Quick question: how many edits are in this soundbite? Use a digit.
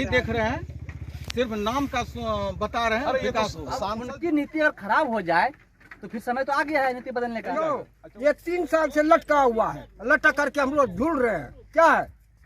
2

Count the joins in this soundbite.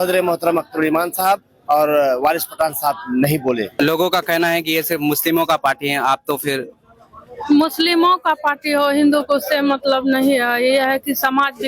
1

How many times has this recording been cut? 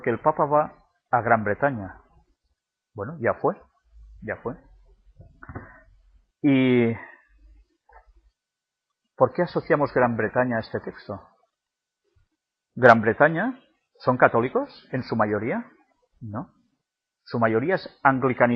1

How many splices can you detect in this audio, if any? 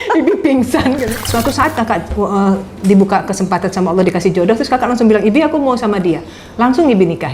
1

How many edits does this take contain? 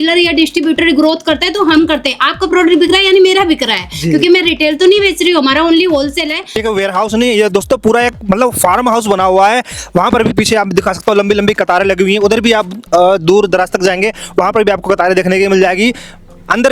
1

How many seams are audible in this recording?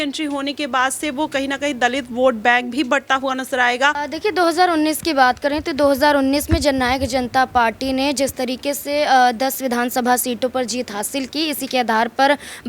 1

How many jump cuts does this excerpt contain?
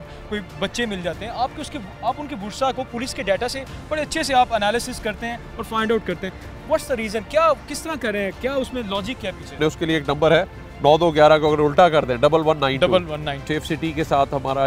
2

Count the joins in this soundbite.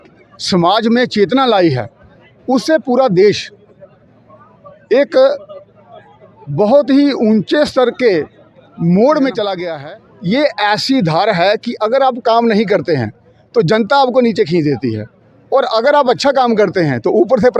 1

